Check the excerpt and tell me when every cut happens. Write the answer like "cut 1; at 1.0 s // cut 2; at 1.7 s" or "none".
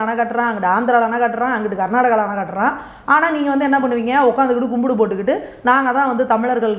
none